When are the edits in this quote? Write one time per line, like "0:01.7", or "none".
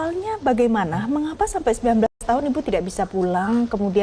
none